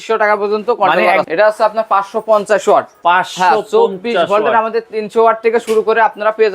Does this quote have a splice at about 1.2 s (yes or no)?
yes